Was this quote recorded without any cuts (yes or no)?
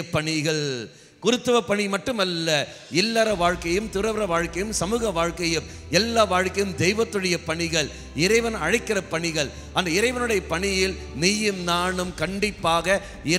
yes